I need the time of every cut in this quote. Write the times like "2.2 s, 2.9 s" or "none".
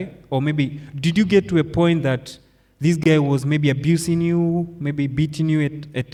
none